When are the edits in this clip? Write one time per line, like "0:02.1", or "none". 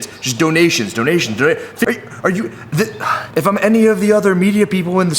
0:01.9
0:03.2